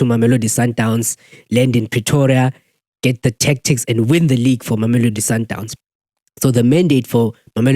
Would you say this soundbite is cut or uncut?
cut